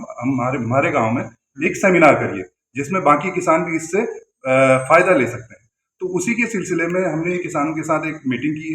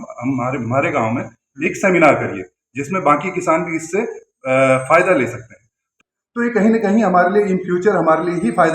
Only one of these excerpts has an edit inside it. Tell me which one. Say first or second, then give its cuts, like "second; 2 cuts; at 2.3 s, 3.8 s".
second; 1 cut; at 5.9 s